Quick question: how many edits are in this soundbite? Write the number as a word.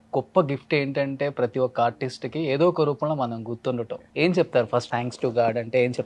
two